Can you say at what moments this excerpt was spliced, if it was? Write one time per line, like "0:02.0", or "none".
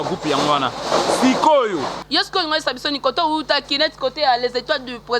0:02.0